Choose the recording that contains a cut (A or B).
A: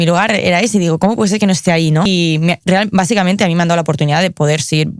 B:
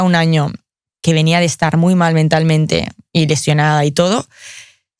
A